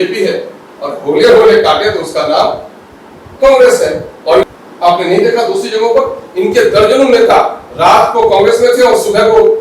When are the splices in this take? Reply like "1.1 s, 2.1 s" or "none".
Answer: 4.4 s